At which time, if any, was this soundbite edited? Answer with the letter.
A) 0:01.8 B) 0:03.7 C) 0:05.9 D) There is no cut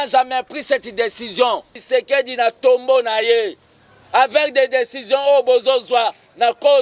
A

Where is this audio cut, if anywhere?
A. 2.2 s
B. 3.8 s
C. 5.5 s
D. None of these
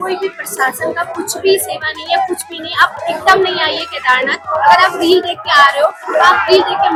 D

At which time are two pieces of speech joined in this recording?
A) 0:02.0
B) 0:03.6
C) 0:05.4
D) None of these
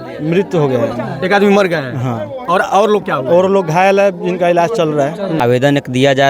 C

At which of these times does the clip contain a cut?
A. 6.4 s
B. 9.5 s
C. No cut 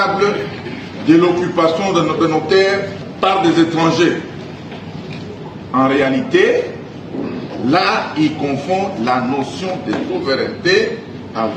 C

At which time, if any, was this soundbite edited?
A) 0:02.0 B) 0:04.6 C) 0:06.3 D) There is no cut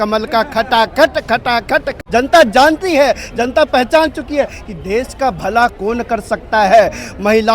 A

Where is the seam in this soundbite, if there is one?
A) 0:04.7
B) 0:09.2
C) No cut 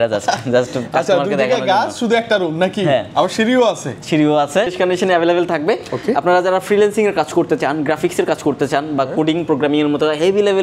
A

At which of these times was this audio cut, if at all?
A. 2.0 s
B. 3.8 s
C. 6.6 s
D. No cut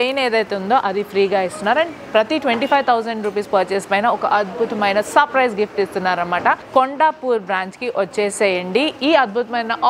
C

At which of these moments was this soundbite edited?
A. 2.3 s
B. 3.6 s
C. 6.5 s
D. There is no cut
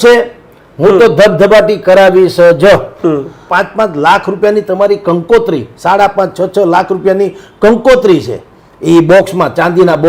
B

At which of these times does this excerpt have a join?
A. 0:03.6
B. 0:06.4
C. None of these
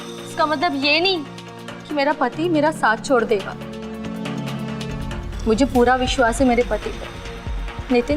C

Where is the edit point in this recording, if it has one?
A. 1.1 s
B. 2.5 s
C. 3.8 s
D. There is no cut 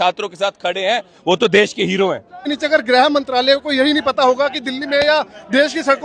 B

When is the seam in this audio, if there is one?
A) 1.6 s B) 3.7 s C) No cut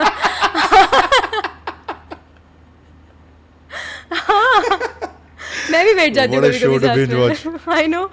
C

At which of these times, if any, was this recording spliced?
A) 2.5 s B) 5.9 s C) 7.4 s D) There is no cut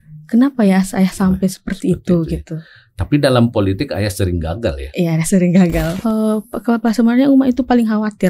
B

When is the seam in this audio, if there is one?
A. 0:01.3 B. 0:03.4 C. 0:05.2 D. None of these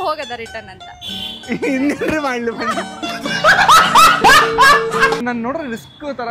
C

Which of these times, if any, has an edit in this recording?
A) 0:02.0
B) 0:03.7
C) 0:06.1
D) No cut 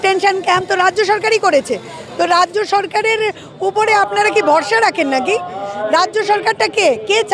D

